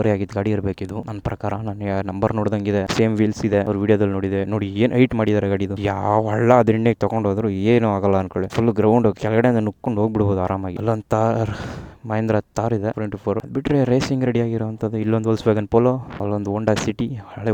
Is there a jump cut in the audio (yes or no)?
no